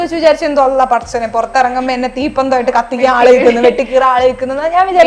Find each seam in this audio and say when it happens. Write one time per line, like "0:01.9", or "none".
none